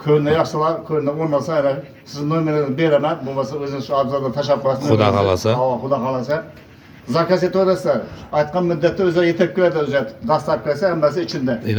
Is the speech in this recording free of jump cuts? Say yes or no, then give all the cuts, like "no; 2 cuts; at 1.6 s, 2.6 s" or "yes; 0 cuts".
yes; 0 cuts